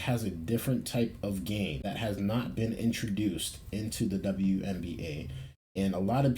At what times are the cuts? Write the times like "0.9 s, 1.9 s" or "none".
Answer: 1.8 s